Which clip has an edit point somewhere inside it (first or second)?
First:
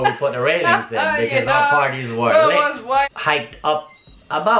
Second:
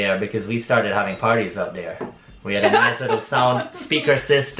first